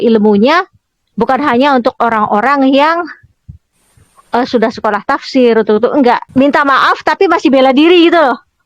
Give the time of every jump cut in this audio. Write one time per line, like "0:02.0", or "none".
0:06.2